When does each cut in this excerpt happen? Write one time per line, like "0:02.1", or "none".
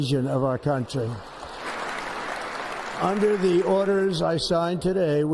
0:01.6